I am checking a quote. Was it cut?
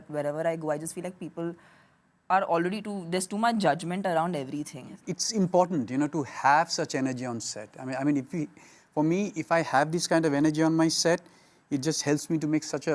yes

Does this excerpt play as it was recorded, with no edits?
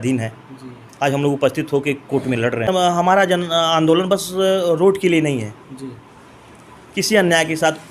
no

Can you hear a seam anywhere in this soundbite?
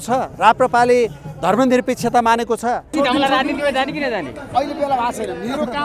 yes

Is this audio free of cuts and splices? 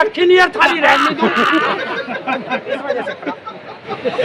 yes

